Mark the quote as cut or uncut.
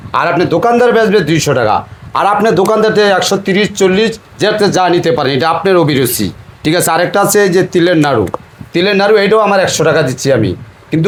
uncut